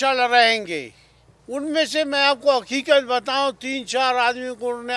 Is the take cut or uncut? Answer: cut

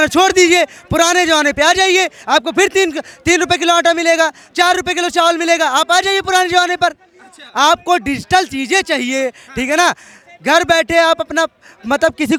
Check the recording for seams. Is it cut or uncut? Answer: uncut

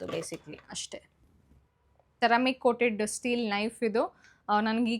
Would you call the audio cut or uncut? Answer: cut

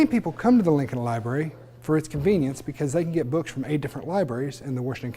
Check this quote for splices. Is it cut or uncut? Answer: uncut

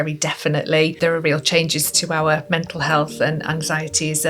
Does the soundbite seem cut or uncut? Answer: cut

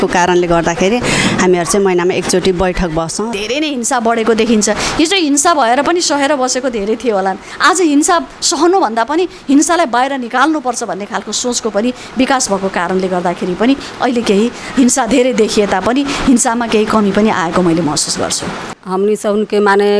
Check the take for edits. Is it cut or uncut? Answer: cut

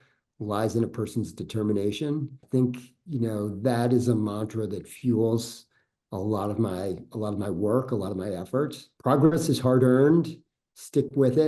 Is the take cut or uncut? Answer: cut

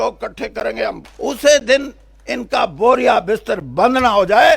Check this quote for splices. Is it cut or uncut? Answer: cut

